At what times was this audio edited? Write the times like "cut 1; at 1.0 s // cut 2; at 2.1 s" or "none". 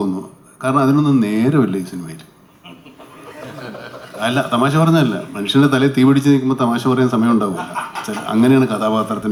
none

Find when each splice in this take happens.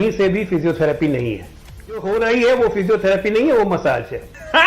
cut 1; at 2.0 s

